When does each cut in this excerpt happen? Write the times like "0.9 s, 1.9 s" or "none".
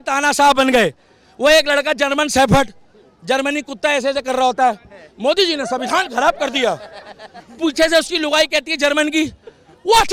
none